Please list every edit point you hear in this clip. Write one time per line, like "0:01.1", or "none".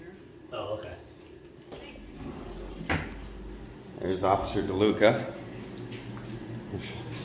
0:01.7